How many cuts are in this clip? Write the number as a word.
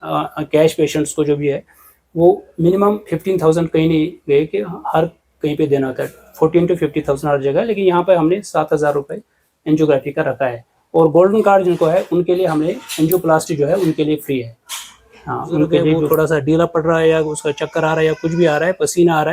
one